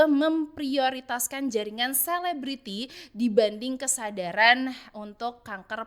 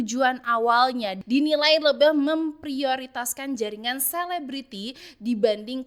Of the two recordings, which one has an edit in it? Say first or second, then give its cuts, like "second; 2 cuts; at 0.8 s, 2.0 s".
second; 1 cut; at 1.2 s